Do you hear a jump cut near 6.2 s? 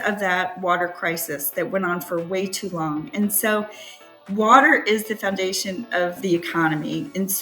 yes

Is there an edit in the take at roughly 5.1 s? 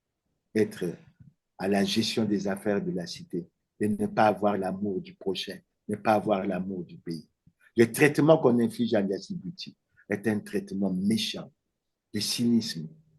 no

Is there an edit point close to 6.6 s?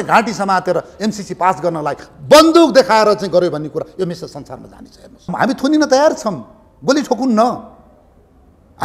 no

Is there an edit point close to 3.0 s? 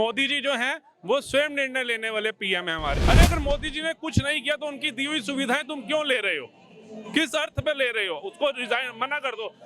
yes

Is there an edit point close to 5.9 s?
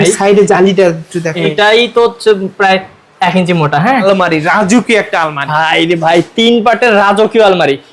no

